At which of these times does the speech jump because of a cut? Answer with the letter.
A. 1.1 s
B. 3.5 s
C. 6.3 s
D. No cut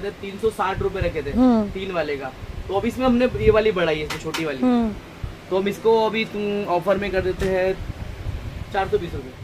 D